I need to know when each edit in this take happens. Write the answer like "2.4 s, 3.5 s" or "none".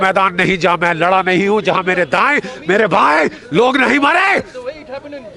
none